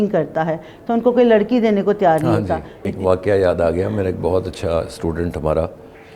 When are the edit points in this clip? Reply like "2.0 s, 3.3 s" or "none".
2.8 s